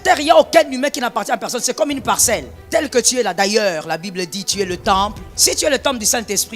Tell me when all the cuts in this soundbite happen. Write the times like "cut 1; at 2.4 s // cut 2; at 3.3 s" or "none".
cut 1; at 2.6 s // cut 2; at 5.3 s